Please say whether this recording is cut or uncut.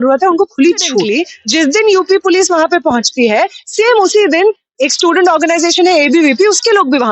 cut